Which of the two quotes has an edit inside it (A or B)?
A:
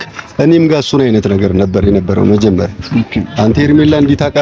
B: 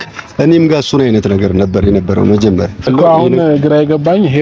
B